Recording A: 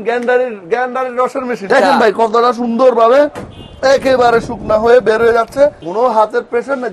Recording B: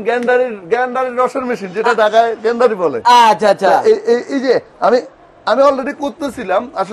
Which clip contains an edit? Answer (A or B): A